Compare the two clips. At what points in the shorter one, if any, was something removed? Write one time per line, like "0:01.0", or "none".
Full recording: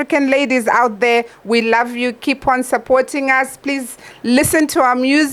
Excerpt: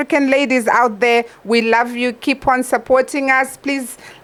none